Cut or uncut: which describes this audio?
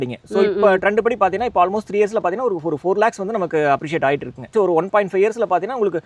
cut